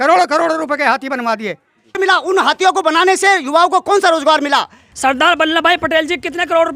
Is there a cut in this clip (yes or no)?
yes